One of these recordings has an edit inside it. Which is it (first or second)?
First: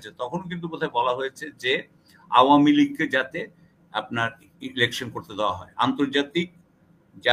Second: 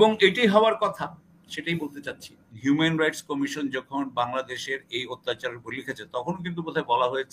second